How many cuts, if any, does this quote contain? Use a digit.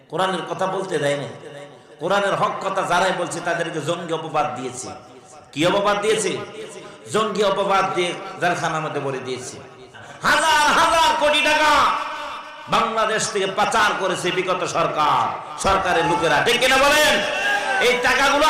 1